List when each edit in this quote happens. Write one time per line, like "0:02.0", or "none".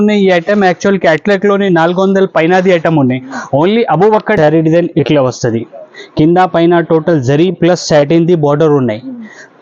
0:04.4